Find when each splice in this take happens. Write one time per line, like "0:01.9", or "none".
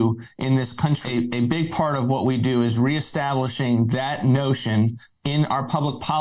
0:01.0